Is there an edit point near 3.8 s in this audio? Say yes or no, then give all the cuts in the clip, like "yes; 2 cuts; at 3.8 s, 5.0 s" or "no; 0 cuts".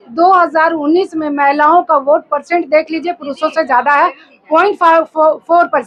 no; 0 cuts